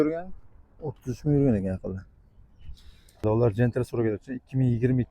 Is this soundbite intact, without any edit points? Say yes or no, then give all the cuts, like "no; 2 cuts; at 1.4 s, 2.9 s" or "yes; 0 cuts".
no; 1 cut; at 3.2 s